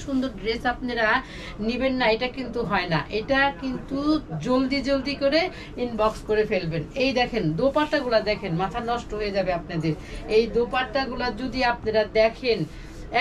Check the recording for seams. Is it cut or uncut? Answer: uncut